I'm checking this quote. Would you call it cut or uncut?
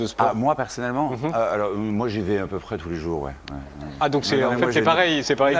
uncut